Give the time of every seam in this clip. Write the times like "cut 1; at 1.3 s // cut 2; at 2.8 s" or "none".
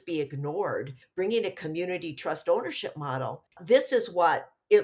cut 1; at 0.9 s // cut 2; at 3.4 s